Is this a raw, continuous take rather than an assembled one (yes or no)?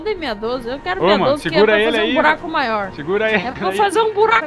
no